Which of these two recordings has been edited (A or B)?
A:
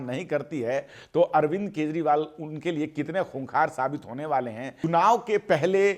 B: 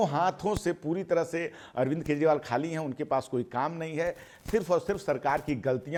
A